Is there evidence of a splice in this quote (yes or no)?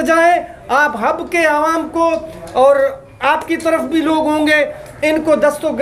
no